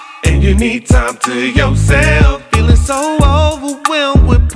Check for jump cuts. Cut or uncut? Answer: uncut